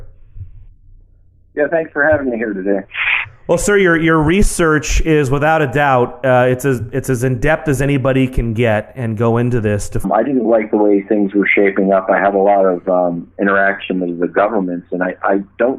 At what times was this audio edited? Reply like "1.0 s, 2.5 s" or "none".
none